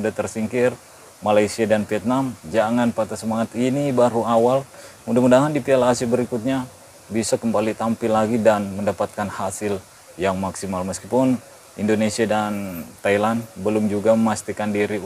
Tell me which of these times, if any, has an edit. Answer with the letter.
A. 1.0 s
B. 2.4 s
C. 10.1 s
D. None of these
B